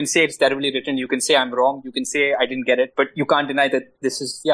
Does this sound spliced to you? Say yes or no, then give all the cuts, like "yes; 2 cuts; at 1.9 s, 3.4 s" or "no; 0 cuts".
no; 0 cuts